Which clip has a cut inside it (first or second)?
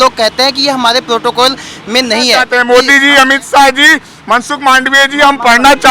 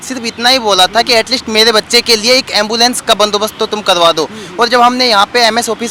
first